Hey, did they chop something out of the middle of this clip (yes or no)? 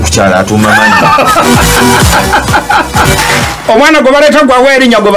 no